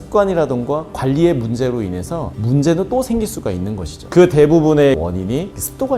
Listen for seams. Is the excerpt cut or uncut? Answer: uncut